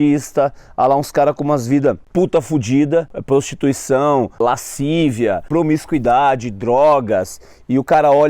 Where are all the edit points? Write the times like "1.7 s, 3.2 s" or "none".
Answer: 2.0 s, 3.2 s, 4.4 s, 5.4 s